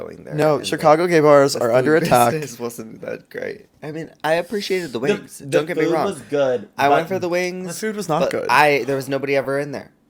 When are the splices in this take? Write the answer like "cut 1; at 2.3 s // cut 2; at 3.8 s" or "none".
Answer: none